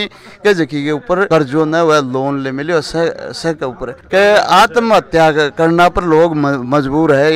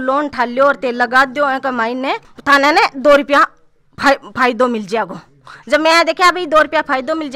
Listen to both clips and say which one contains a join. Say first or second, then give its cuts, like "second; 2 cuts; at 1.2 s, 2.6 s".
first; 1 cut; at 3.9 s